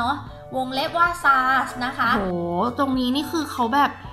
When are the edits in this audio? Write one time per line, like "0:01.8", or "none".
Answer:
0:02.0